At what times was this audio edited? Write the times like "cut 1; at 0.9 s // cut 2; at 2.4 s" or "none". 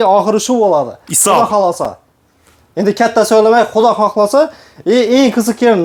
none